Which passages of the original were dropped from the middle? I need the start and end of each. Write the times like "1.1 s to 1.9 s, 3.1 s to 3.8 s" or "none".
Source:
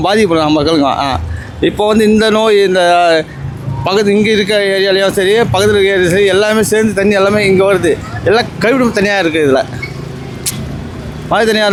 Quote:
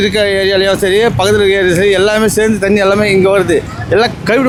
none